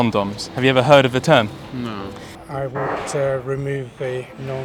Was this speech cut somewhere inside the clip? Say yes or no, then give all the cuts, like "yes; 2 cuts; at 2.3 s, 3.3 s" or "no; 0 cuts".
yes; 1 cut; at 2.3 s